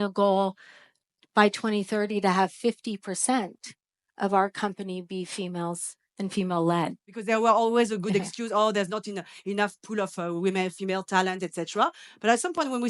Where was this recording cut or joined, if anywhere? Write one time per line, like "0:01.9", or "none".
0:07.1